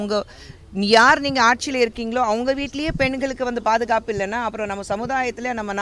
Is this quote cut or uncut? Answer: uncut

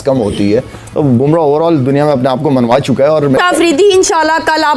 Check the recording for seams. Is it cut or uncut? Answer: cut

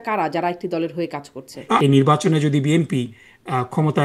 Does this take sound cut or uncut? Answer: cut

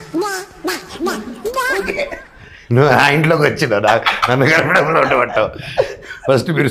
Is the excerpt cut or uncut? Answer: uncut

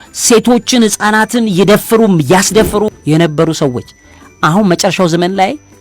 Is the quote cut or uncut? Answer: cut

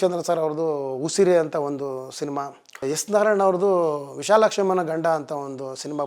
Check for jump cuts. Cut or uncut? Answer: cut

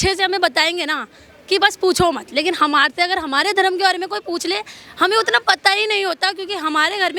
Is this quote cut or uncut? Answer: uncut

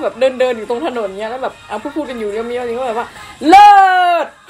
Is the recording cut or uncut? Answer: uncut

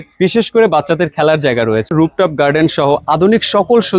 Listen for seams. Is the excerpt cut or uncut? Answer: cut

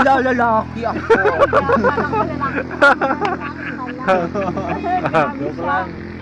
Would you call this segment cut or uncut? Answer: uncut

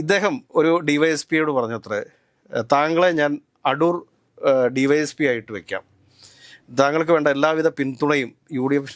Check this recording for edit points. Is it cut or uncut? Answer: uncut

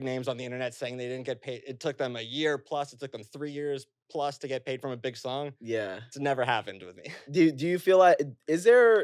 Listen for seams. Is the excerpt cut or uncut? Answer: uncut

